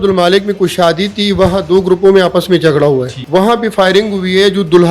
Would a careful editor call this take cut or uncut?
cut